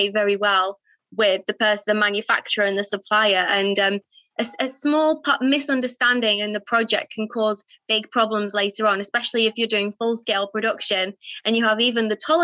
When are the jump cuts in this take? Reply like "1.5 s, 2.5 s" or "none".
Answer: none